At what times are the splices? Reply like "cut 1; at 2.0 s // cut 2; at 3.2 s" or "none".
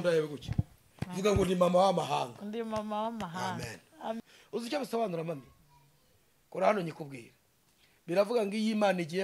cut 1; at 4.2 s